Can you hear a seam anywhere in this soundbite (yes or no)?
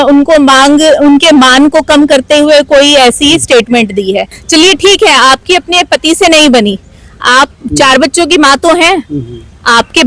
yes